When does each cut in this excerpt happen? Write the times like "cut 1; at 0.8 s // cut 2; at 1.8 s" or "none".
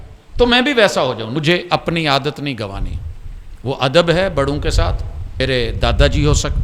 cut 1; at 1.4 s // cut 2; at 5.4 s